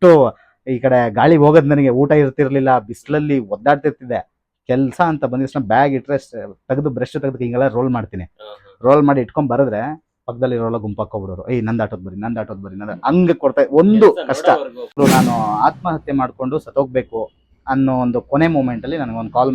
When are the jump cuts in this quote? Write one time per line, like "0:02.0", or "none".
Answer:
0:15.0